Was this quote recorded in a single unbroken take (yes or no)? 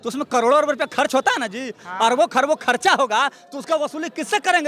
no